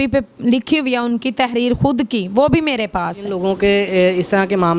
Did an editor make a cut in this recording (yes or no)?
yes